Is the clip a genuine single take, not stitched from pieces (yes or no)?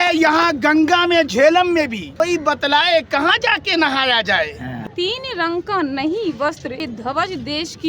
no